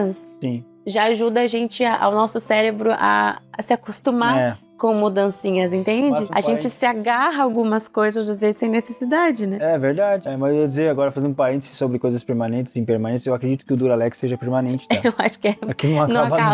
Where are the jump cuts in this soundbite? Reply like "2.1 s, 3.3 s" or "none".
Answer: none